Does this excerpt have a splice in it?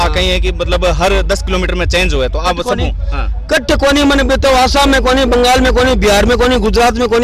no; 0 cuts

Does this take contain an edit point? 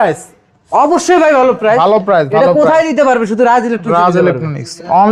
no; 0 cuts

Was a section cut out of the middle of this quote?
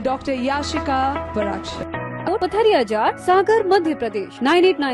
yes; 1 cut; at 2.3 s

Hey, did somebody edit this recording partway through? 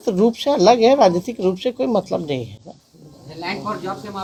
no; 0 cuts

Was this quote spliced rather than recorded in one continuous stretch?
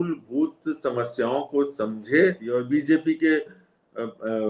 yes; 1 cut; at 2.5 s

